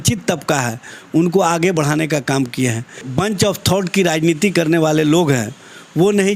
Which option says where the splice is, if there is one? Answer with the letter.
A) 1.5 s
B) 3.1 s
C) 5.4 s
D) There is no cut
B